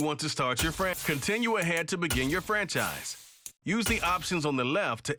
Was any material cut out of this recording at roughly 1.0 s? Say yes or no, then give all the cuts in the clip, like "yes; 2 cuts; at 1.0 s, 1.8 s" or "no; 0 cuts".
yes; 1 cut; at 1.0 s